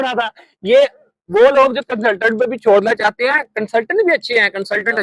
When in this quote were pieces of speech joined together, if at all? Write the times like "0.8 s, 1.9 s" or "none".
none

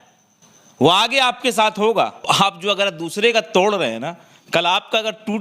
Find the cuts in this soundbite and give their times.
2.3 s

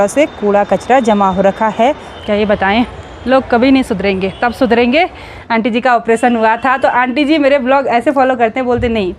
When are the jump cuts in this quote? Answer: 2.1 s, 5.3 s

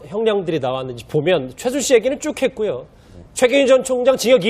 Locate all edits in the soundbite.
1.0 s

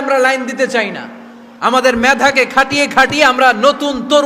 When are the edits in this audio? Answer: none

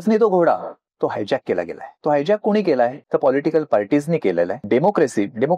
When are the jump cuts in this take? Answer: 1.8 s, 3.0 s, 4.6 s

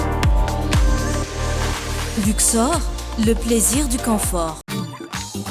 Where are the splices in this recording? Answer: 4.6 s

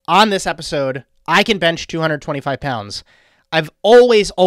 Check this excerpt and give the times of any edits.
none

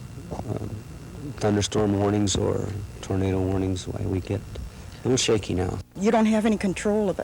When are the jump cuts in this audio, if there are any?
6.0 s

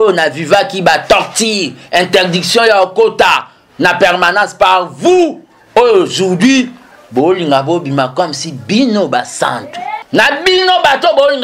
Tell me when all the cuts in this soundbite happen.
9.9 s

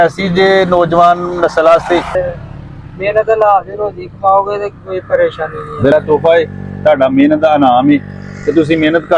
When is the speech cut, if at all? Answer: 2.1 s, 5.9 s

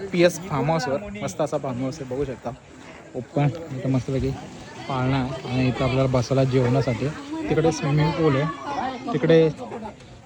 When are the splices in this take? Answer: none

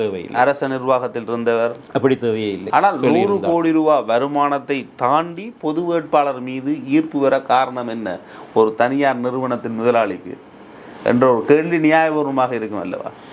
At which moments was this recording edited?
2.6 s

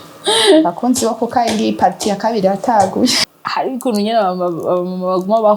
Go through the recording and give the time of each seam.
3.2 s

